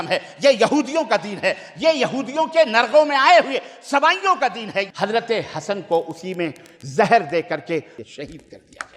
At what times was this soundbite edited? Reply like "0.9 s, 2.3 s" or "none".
4.9 s, 7.9 s

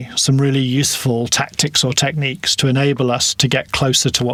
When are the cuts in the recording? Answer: none

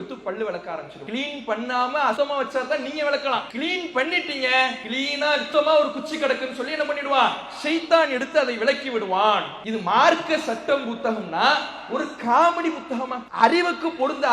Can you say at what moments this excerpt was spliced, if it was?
0.9 s, 2.2 s, 3.5 s, 5.2 s, 9.6 s, 13.2 s

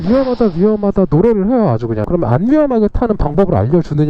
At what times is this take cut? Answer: 2.0 s

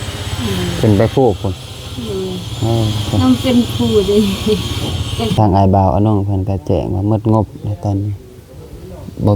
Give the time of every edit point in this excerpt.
5.3 s

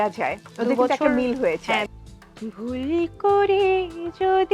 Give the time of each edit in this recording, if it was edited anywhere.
1.9 s

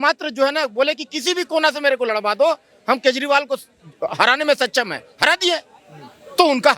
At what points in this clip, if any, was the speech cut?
none

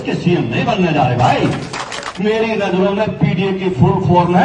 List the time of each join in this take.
2.1 s

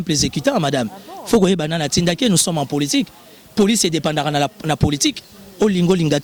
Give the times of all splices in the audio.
none

